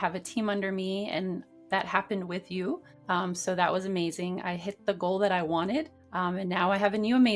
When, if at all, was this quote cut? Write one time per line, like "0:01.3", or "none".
0:02.9
0:06.0